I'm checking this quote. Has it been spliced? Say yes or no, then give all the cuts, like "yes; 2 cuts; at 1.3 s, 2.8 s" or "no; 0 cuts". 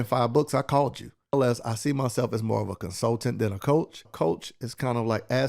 yes; 2 cuts; at 1.3 s, 4.0 s